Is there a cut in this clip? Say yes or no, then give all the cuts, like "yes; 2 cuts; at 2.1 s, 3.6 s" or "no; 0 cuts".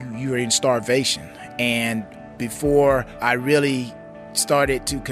yes; 2 cuts; at 2.1 s, 3.1 s